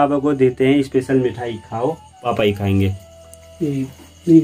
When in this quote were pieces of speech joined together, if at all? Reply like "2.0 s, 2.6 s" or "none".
2.2 s